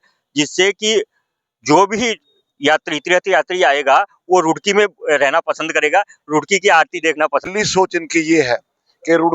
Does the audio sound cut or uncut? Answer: cut